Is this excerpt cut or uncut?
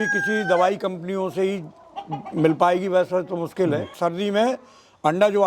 cut